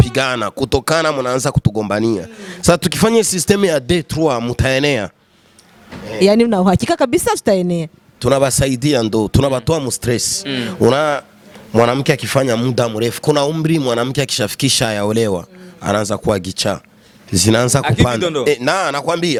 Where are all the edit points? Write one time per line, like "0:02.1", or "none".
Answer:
none